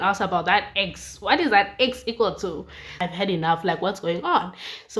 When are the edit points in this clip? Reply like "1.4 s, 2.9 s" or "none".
3.0 s